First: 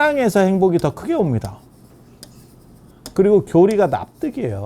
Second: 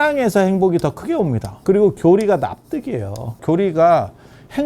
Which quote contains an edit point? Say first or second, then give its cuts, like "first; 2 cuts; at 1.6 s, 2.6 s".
second; 2 cuts; at 1.5 s, 3.4 s